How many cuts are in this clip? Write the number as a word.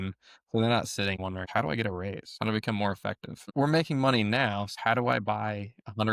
four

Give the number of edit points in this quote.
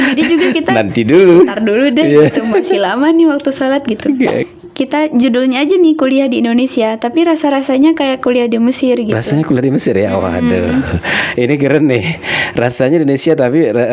one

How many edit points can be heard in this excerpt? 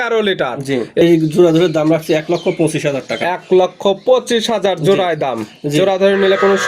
one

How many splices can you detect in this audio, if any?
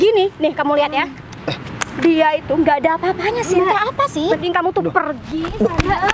one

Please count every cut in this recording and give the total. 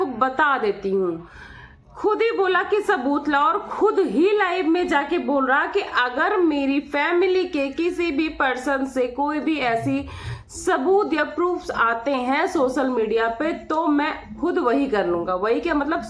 zero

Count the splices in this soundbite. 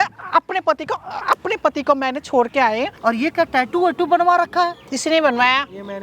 one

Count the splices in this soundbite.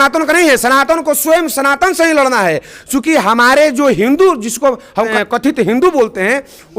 one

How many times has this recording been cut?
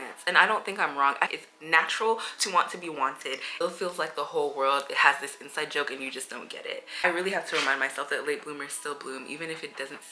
three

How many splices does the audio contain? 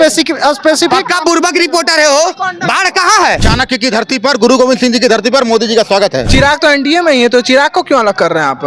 two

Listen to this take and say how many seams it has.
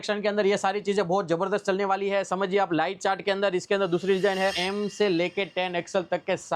one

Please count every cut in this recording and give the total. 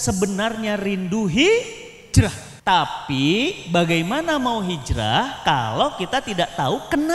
one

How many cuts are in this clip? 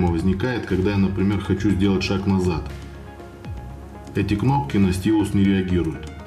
zero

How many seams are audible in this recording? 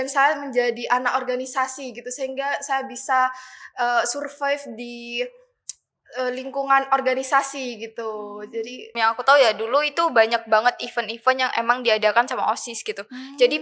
one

